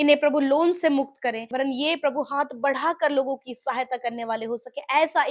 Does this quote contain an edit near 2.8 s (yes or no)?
no